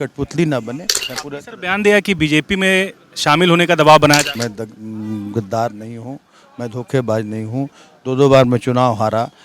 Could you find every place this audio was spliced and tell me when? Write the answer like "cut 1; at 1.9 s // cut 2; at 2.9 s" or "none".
cut 1; at 1.1 s // cut 2; at 4.3 s